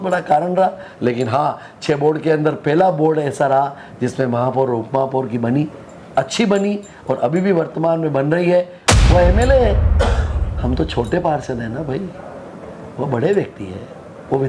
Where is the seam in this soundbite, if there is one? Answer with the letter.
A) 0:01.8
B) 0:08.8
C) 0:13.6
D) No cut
B